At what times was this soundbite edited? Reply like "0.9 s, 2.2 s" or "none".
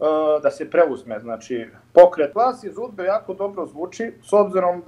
2.3 s